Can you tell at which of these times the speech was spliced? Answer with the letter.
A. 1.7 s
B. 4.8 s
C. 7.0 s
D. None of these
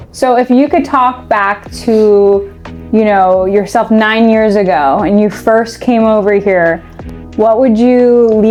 D